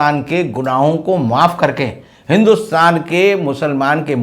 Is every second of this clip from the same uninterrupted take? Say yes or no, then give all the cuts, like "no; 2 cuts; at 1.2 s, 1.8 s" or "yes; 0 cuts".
yes; 0 cuts